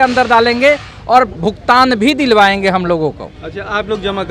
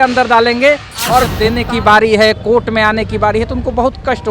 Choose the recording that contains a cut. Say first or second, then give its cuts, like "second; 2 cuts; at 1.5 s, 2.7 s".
second; 1 cut; at 1.3 s